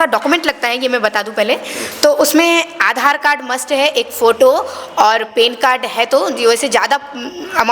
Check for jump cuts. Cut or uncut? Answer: uncut